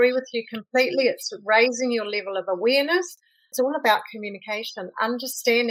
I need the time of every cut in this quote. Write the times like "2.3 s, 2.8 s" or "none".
3.5 s